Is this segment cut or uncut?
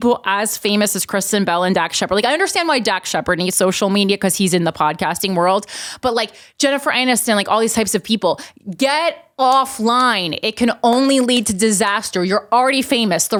uncut